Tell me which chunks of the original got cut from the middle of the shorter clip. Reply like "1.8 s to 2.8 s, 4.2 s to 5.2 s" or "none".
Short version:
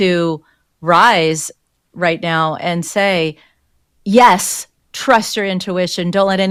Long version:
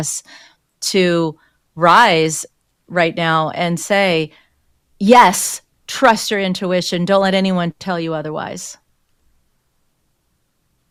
none